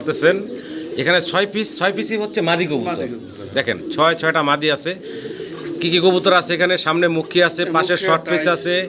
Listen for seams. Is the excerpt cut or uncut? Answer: uncut